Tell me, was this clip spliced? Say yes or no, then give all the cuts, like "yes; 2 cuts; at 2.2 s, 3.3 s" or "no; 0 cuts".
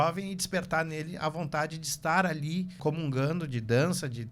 yes; 1 cut; at 2.8 s